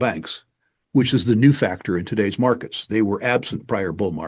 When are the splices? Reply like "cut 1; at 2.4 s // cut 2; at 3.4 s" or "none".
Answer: none